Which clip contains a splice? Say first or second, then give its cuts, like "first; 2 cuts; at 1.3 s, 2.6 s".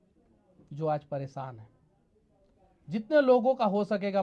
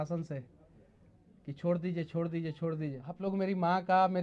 second; 1 cut; at 3.1 s